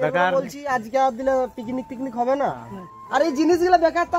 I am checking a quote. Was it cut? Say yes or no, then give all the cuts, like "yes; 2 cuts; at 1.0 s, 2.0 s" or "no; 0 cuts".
no; 0 cuts